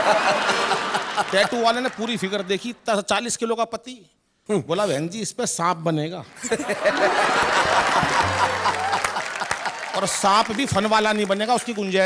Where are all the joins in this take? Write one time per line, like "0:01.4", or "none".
none